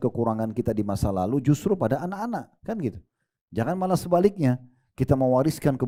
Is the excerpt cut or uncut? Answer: uncut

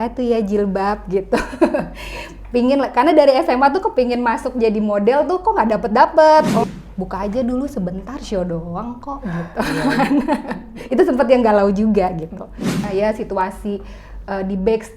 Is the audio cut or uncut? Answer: cut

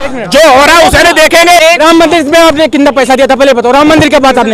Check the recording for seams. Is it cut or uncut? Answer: cut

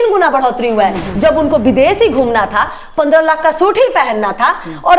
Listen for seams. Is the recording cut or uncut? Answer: cut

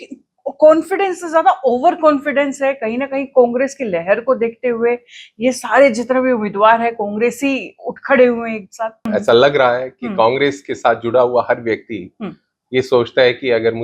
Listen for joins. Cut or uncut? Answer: cut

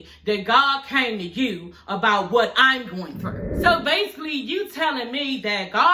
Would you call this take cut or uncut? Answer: uncut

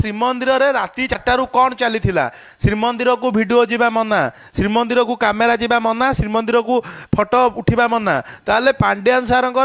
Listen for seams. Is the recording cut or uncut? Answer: cut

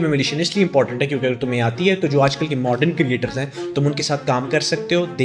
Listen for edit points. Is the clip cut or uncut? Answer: uncut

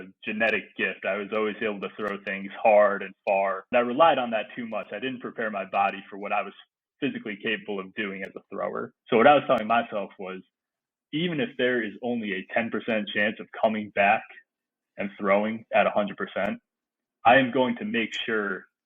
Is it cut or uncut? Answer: cut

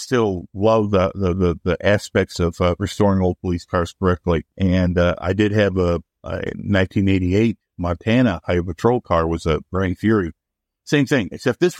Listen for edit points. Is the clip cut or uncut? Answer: cut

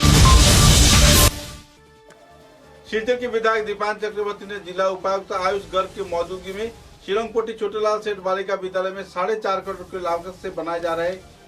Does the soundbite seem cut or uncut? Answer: cut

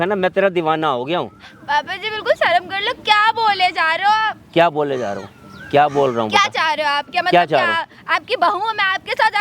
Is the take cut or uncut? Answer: uncut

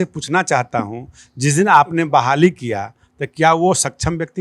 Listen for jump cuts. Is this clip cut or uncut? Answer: uncut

